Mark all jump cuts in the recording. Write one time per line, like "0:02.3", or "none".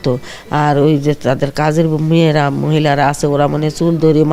none